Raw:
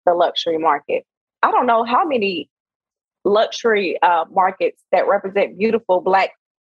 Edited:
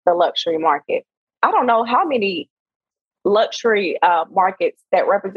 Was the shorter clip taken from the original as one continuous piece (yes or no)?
yes